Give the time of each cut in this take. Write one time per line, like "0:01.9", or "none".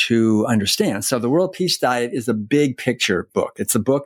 none